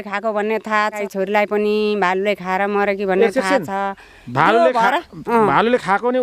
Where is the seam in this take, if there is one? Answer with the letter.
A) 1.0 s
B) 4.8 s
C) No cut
A